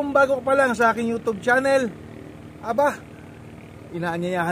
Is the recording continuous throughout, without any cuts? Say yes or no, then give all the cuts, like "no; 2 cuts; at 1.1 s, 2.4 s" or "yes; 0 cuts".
yes; 0 cuts